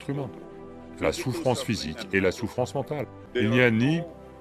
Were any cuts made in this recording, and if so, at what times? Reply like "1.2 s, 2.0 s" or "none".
3.2 s